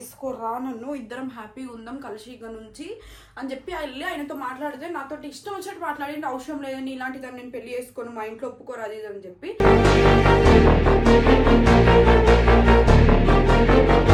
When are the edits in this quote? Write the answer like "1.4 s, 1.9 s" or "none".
none